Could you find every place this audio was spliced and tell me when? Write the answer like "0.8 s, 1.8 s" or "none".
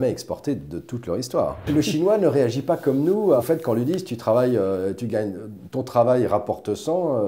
1.6 s, 3.4 s